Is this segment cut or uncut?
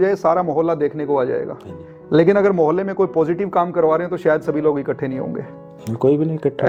uncut